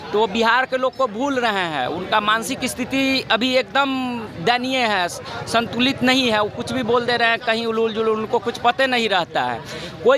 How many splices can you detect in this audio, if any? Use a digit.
0